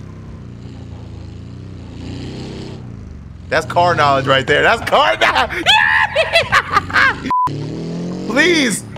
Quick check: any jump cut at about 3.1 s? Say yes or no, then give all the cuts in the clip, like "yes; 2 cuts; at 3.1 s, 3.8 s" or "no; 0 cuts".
no; 1 cut; at 7.4 s